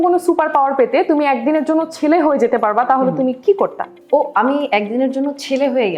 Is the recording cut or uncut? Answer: uncut